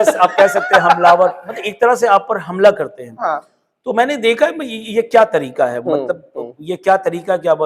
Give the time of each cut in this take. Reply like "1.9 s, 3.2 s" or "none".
none